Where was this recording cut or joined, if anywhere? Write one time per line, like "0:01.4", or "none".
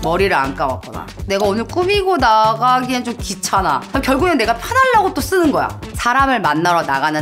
0:03.9
0:05.8